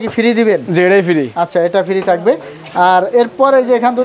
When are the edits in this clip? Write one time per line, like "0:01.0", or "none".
none